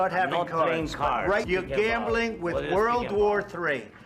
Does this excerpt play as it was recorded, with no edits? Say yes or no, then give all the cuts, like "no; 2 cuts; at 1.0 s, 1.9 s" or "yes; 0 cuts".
no; 1 cut; at 1.4 s